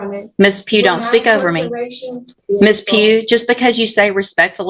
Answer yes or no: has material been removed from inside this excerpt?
yes